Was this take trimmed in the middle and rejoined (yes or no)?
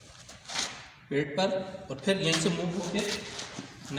no